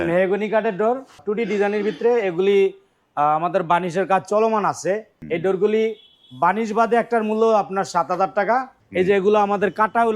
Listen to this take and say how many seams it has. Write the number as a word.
three